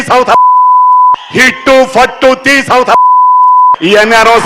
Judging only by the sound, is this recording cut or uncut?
cut